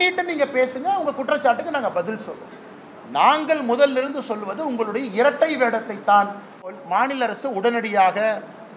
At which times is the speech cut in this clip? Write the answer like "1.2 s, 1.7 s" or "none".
6.7 s